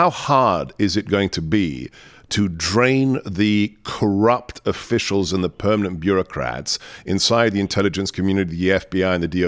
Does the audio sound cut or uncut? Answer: uncut